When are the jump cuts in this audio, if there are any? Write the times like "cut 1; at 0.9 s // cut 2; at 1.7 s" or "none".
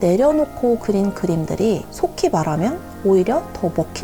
cut 1; at 1.9 s

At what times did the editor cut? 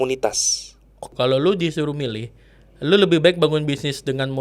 cut 1; at 1.1 s

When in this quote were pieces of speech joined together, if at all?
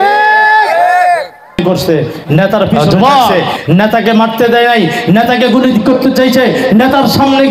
cut 1; at 3.5 s

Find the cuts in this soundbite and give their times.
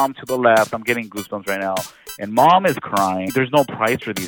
cut 1; at 3.3 s

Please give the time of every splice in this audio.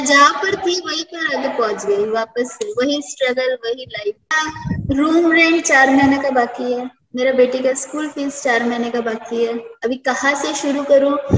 cut 1; at 4.5 s

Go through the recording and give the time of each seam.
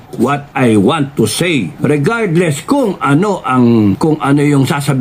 cut 1; at 1.7 s // cut 2; at 4.0 s

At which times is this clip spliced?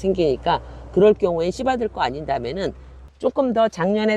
cut 1; at 3.0 s

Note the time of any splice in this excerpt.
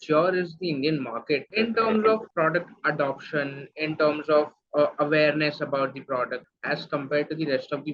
cut 1; at 1.5 s // cut 2; at 2.3 s // cut 3; at 6.5 s

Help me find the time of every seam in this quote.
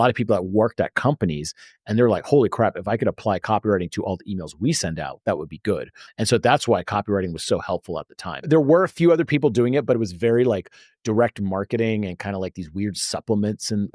cut 1; at 6.0 s // cut 2; at 8.4 s

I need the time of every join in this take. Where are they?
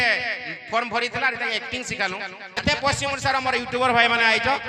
cut 1; at 2.6 s

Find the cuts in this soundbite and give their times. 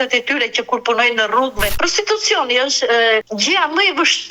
cut 1; at 1.7 s // cut 2; at 3.3 s

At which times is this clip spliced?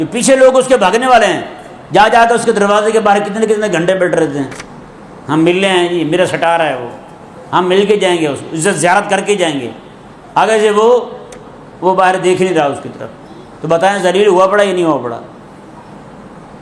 none

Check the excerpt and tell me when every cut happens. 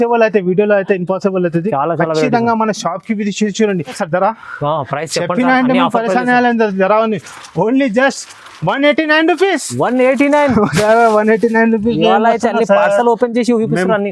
cut 1; at 4.0 s

